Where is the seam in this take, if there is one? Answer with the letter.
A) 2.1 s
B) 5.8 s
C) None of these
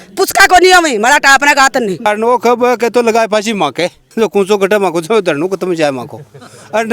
A